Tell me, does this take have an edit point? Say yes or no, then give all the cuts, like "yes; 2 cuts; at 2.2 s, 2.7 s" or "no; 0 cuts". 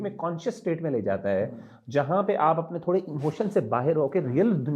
no; 0 cuts